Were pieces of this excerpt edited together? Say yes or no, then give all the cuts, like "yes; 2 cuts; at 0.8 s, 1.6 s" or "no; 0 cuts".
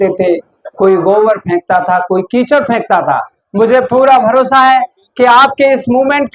no; 0 cuts